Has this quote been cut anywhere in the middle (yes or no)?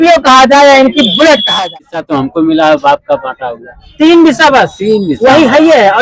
yes